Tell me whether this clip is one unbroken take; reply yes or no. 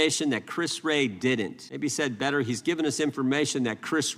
yes